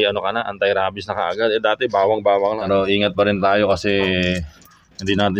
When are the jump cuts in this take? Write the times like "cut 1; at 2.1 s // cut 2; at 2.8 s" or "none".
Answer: cut 1; at 2.6 s